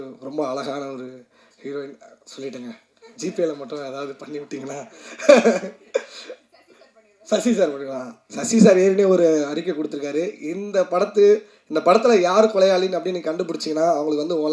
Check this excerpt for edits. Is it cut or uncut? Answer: uncut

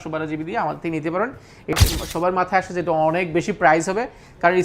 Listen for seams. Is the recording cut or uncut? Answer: cut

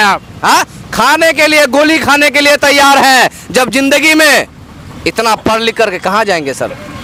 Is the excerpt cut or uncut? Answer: uncut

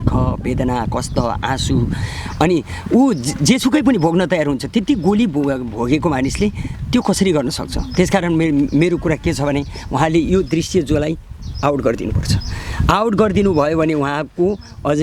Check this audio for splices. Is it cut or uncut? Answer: uncut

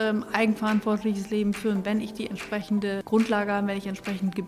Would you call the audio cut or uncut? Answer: cut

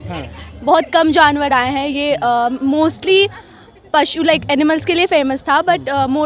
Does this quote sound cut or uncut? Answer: uncut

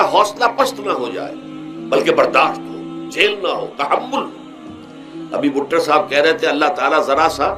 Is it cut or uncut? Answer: uncut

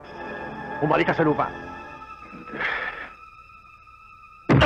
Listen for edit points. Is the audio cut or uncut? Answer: cut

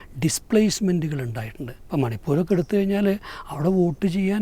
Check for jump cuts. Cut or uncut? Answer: uncut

